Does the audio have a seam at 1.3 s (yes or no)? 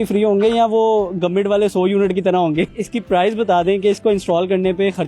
no